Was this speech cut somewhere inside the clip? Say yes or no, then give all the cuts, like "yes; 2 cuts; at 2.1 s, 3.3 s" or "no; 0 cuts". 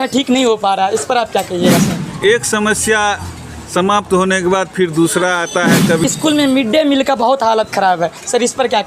yes; 2 cuts; at 2.0 s, 6.0 s